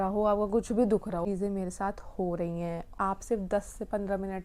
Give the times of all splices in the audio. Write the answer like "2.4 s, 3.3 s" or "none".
1.2 s, 2.9 s